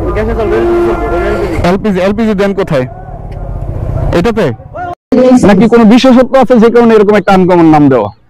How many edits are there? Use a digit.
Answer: 1